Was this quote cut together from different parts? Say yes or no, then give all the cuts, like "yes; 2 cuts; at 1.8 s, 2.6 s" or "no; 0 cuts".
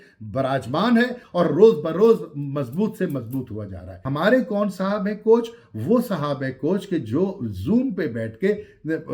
yes; 1 cut; at 4.0 s